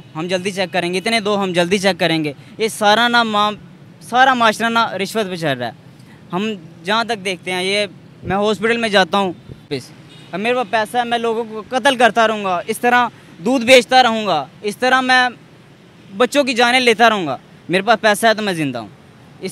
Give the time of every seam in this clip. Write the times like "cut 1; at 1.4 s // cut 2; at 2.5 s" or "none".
cut 1; at 9.7 s